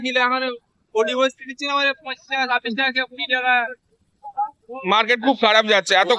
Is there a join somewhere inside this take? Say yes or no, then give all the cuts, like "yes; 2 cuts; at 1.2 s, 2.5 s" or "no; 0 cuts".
no; 0 cuts